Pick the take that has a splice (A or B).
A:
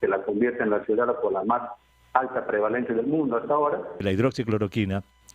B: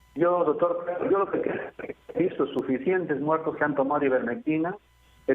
A